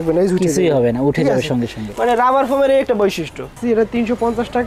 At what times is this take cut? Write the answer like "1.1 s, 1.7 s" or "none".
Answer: 3.6 s